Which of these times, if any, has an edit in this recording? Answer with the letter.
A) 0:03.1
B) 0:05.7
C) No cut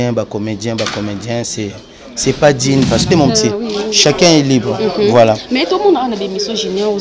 A